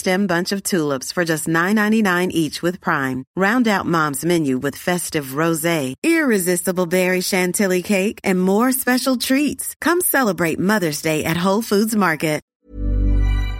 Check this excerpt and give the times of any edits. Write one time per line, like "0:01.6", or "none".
0:12.5

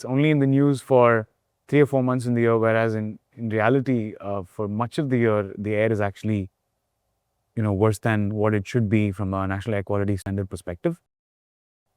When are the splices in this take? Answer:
none

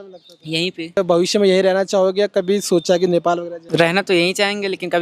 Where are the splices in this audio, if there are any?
0:01.0
0:03.5

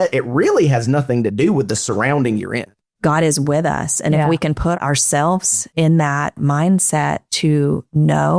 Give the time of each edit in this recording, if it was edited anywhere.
0:02.8
0:05.6
0:07.5

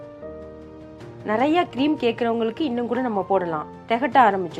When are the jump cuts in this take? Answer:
0:01.2

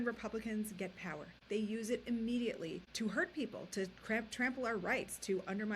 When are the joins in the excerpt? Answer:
0:01.3
0:02.8

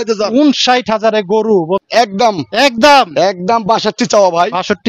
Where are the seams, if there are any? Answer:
0:01.8

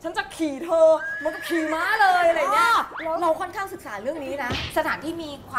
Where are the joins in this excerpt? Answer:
0:04.6

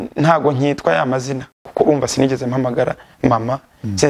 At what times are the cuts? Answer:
0:01.6

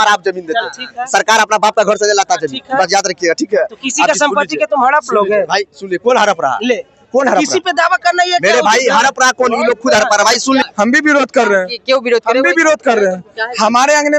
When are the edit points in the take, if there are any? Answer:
0:10.7

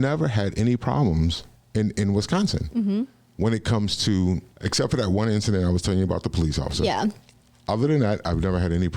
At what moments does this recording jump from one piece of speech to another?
0:04.6

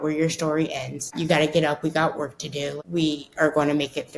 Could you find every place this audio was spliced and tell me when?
0:01.1
0:02.8

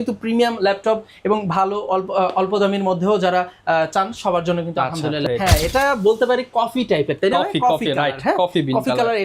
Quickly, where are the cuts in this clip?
0:05.3

